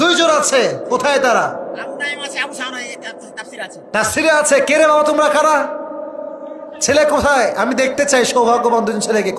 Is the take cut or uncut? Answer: uncut